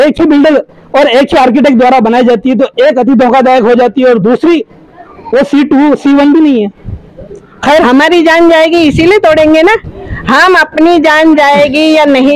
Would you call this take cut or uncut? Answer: cut